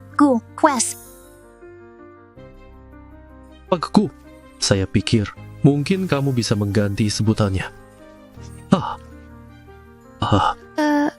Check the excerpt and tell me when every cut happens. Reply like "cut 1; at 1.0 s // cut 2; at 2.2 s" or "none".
cut 1; at 0.8 s // cut 2; at 3.3 s